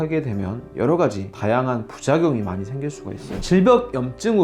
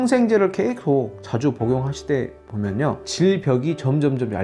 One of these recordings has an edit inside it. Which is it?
first; 1 cut; at 3.4 s

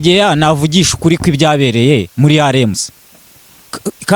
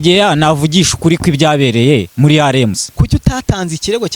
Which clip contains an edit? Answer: second; 1 cut; at 2.8 s

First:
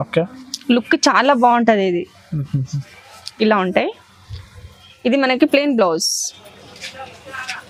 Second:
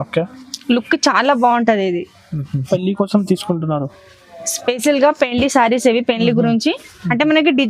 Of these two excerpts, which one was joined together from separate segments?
second; 1 cut; at 2.7 s

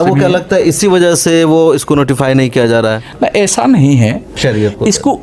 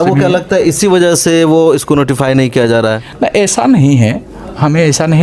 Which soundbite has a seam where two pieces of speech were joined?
first; 1 cut; at 4.3 s

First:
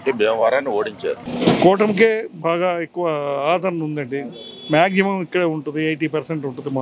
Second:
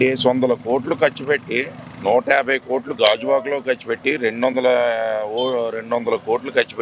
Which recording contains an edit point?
first; 1 cut; at 1.2 s

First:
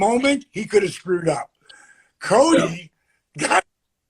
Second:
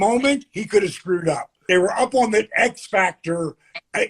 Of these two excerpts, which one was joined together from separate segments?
second; 1 cut; at 1.6 s

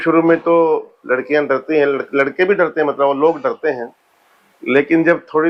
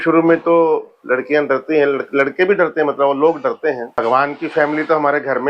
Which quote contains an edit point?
second; 1 cut; at 3.9 s

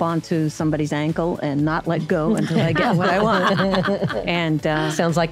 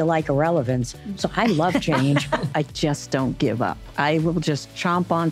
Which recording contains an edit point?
second; 2 cuts; at 2.5 s, 3.8 s

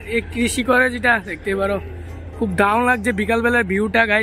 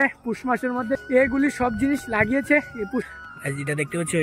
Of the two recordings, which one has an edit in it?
second; 2 cuts; at 1.0 s, 3.1 s

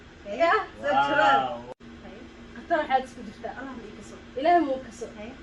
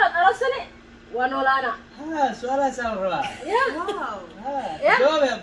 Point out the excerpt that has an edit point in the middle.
first; 1 cut; at 1.6 s

